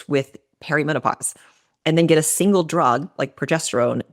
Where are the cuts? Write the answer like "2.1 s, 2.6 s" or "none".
none